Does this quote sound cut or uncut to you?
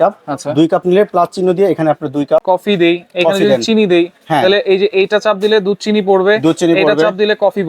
cut